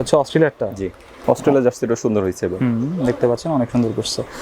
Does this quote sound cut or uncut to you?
cut